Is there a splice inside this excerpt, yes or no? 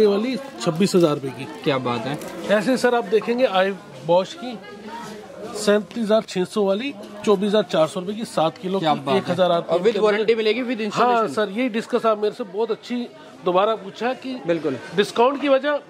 no